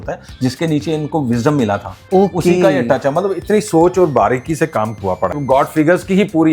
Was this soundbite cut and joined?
yes; 1 cut; at 5.4 s

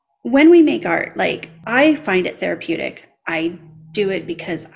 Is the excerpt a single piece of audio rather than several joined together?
no; 1 cut; at 1.6 s

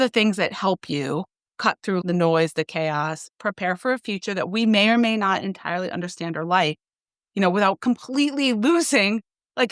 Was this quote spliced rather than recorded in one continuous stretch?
yes; 1 cut; at 2.0 s

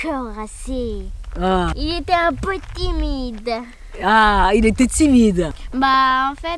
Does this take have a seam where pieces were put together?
yes; 1 cut; at 5.6 s

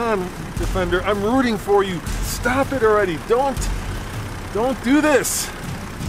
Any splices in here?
no; 0 cuts

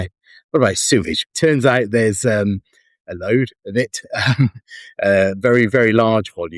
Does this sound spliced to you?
yes; 1 cut; at 1.3 s

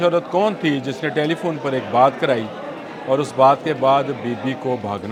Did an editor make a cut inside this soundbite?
no; 0 cuts

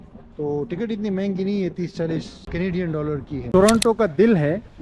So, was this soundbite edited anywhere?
yes; 2 cuts; at 2.4 s, 3.3 s

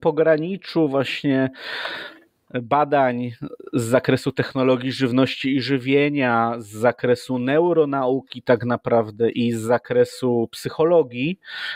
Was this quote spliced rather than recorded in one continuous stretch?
no; 0 cuts

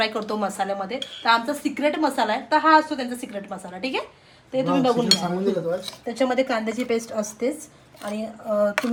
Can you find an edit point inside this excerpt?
no; 0 cuts

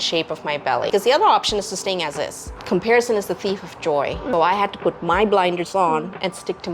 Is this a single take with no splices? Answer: no; 3 cuts; at 0.9 s, 2.5 s, 4.2 s

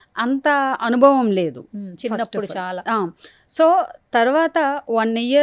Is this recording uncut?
yes; 0 cuts

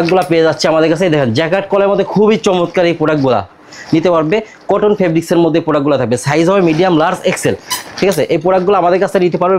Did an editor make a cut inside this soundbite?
no; 0 cuts

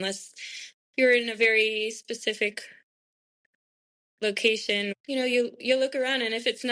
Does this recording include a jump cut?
yes; 1 cut; at 4.9 s

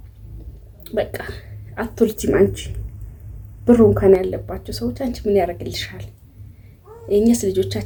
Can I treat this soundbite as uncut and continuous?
yes; 0 cuts

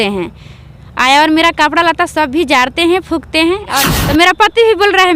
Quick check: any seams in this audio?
yes; 1 cut; at 3.8 s

